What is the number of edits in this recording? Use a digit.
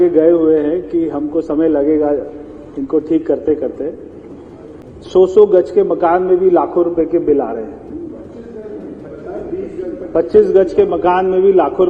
1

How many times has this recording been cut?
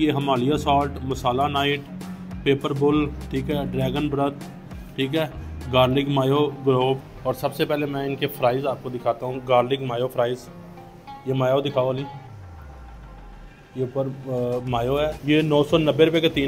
2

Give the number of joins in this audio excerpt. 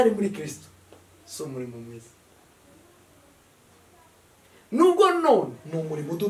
0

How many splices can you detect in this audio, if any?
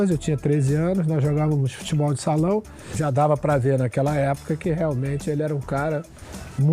1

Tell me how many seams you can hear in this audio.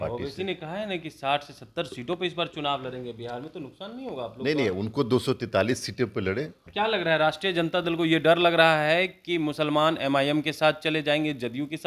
1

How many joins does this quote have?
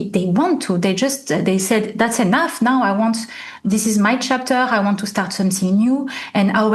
0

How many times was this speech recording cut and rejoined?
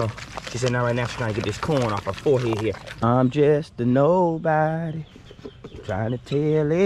1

